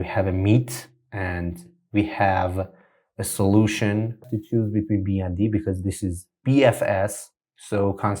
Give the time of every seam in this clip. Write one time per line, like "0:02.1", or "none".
0:04.3

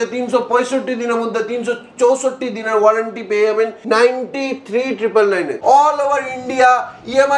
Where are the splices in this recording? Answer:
0:03.8
0:05.5

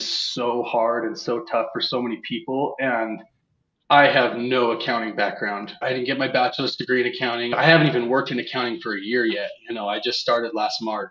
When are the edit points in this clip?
0:05.8
0:07.5

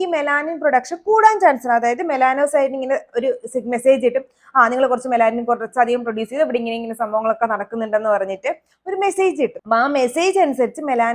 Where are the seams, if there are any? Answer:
none

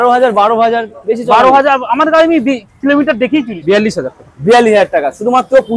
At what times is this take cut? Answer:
0:03.5

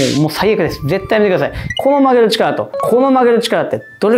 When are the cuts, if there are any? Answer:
0:01.7

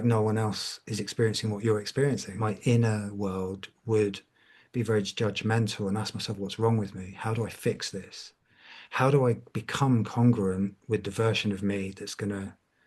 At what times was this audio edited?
0:02.3

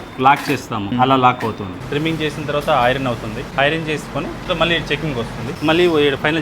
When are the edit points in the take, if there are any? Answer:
0:00.9
0:01.8
0:03.4
0:04.5
0:05.6

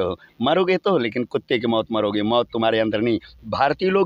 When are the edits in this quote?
none

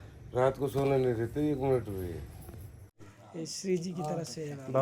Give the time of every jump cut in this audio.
0:02.7

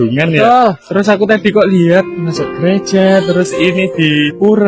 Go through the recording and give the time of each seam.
none

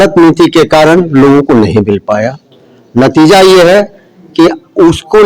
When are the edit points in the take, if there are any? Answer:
none

